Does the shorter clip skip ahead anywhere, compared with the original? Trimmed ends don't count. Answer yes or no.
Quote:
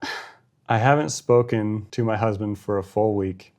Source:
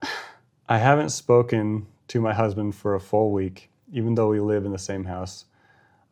yes